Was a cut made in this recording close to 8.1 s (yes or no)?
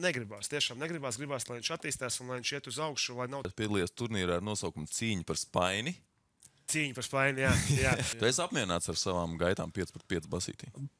yes